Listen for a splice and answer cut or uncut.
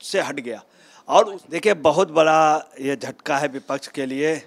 cut